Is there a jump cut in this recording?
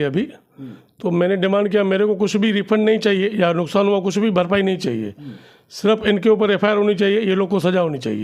no; 0 cuts

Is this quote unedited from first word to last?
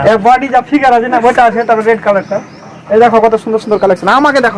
yes; 0 cuts

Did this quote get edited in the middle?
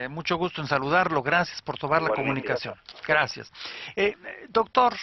yes; 1 cut; at 3.1 s

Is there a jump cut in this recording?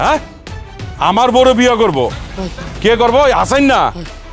yes; 1 cut; at 2.4 s

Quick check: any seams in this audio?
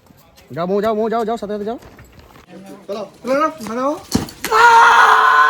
yes; 1 cut; at 2.6 s

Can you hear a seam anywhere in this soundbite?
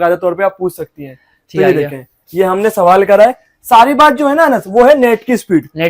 no; 0 cuts

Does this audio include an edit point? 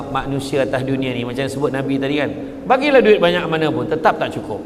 no; 0 cuts

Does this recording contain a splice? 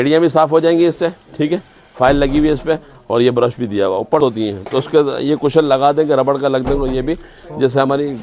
yes; 1 cut; at 4.2 s

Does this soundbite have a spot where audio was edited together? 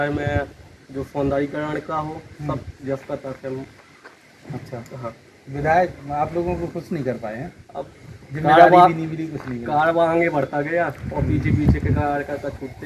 no; 0 cuts

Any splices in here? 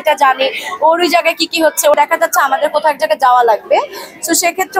yes; 1 cut; at 1.9 s

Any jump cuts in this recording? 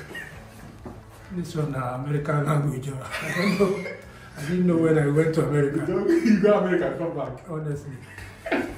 yes; 1 cut; at 1.1 s

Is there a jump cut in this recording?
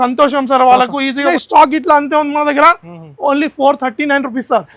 yes; 1 cut; at 1.3 s

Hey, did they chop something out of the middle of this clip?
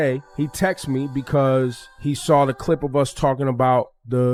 no; 0 cuts

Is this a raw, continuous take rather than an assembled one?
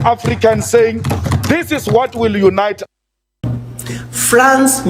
no; 1 cut; at 3.3 s

